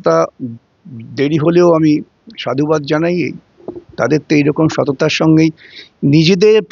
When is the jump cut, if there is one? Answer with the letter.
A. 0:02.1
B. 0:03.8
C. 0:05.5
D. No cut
D